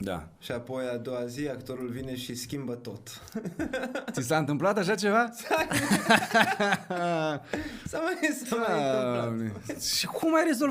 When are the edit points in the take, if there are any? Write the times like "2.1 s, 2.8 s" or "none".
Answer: none